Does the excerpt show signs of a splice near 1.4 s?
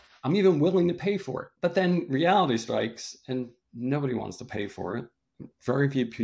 yes; 1 cut; at 1.4 s

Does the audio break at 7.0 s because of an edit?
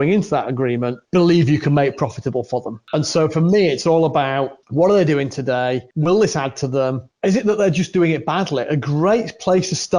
yes; 5 cuts; at 1.0 s, 2.8 s, 4.6 s, 5.9 s, 7.0 s

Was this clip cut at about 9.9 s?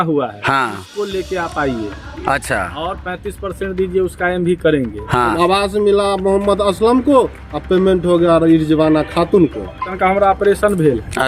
yes; 2 cuts; at 5.3 s, 9.9 s

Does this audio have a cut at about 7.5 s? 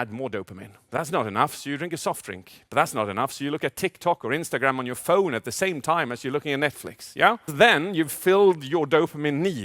yes; 1 cut; at 7.5 s

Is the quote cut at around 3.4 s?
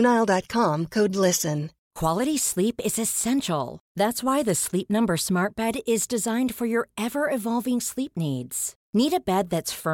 no; 1 cut; at 1.8 s

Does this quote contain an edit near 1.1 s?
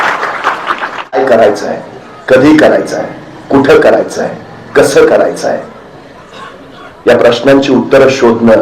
yes; 1 cut; at 1.1 s

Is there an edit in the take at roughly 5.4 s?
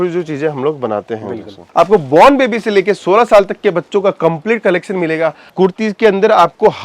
yes; 2 cuts; at 1.6 s, 5.4 s

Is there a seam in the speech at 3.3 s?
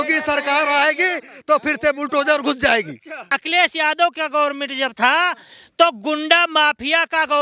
yes; 1 cut; at 3.3 s

